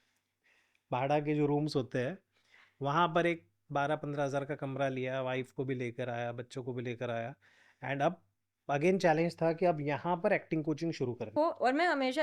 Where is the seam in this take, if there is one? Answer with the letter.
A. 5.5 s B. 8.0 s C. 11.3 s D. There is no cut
C